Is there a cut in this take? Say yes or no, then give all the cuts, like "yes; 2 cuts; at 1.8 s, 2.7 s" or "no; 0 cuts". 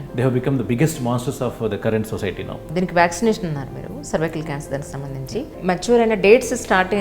yes; 2 cuts; at 2.7 s, 5.5 s